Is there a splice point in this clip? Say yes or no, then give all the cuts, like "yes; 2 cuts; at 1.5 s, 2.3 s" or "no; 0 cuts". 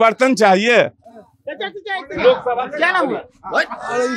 no; 0 cuts